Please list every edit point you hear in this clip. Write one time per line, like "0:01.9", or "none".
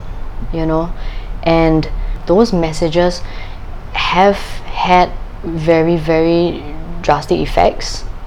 0:02.1